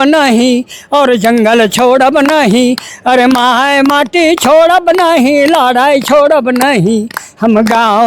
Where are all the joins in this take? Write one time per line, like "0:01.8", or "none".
none